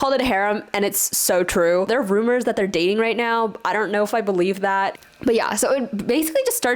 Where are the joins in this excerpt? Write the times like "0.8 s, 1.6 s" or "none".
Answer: 1.9 s, 5.0 s